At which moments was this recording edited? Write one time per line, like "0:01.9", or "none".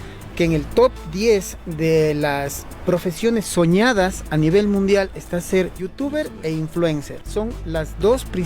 0:05.9
0:07.2